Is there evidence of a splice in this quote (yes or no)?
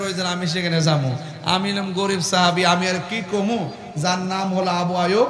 no